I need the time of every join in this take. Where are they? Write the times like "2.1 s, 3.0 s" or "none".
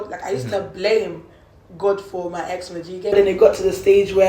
3.1 s